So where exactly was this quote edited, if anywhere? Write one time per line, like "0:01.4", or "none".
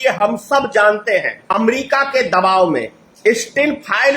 0:01.4
0:03.0

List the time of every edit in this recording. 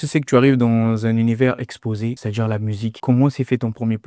0:02.3

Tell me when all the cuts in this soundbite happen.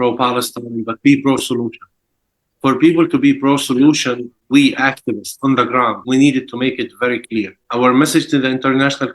0:04.4
0:06.0
0:07.6

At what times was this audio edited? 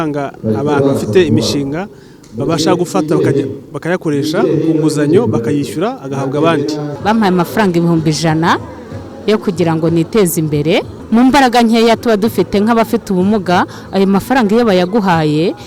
0:06.9
0:11.0

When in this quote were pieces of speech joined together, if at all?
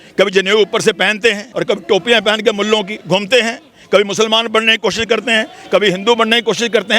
0:01.5

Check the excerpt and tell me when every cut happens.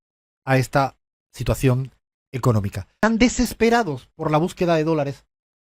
0:02.9

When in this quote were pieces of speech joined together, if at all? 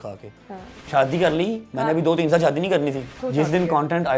0:00.8
0:03.2

